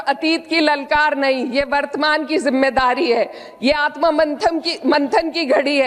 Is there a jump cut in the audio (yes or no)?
no